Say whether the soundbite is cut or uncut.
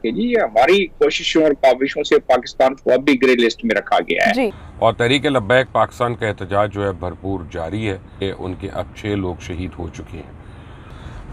cut